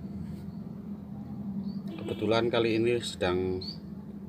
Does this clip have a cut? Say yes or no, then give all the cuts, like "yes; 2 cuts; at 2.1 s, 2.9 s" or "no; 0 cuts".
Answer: no; 0 cuts